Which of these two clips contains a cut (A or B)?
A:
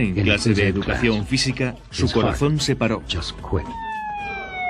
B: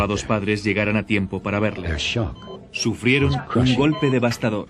A